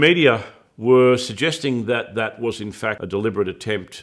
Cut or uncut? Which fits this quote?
cut